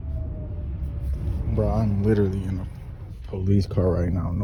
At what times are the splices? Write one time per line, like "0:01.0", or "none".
none